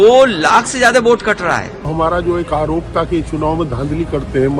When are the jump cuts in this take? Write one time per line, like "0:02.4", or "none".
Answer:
0:01.9